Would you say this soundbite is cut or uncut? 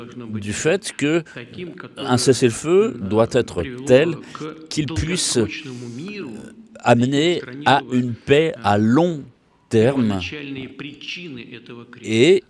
uncut